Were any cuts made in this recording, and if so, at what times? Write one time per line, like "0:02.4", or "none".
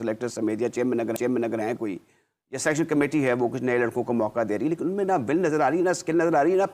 none